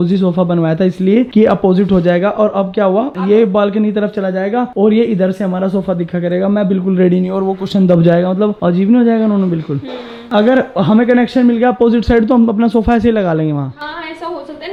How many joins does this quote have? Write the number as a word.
zero